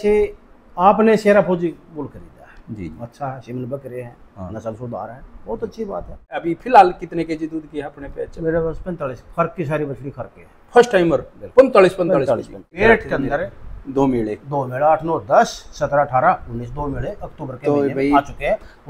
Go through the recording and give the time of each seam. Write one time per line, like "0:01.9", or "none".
0:06.3
0:12.8